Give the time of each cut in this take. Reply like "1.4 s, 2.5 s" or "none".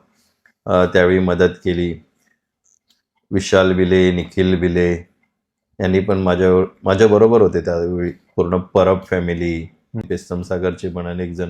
10.0 s